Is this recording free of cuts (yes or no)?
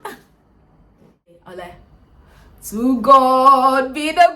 no